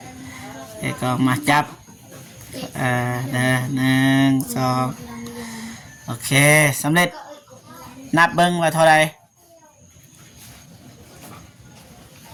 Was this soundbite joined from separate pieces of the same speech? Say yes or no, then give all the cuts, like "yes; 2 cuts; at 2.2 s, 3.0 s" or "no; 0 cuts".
no; 0 cuts